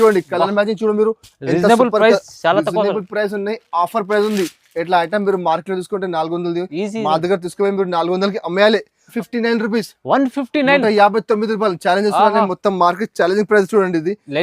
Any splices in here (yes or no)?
yes